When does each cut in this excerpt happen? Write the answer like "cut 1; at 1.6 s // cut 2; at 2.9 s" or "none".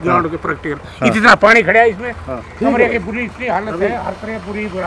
none